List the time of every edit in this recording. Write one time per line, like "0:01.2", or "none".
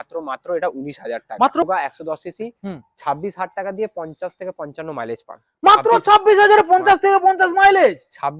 0:01.6

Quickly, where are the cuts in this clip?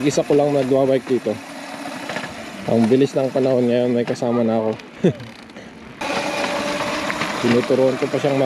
0:06.0

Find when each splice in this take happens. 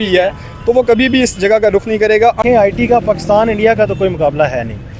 0:02.4

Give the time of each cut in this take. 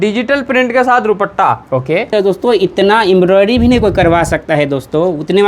0:02.1

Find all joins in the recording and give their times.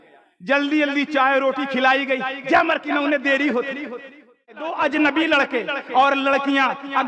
0:04.7

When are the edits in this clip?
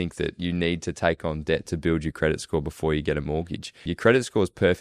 0:03.9

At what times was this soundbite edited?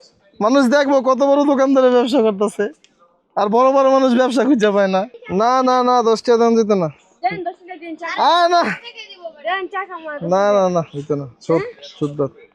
0:05.2

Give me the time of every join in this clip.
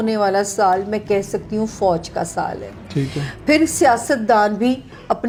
none

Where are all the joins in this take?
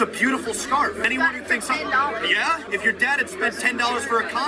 0:01.1
0:02.7

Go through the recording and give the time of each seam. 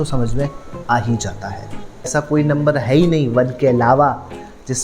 0:02.1

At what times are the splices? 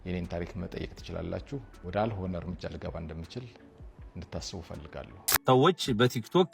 0:05.3

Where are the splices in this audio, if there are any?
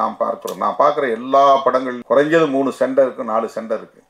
0:01.9

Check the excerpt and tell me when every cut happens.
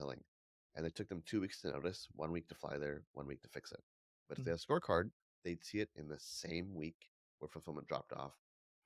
none

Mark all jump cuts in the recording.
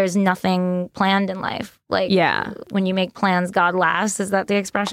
none

